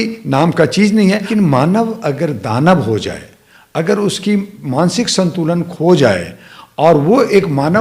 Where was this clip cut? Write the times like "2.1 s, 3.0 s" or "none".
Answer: 1.3 s